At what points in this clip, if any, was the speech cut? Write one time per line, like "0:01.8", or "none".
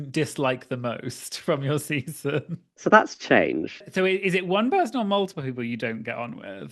0:02.6
0:03.8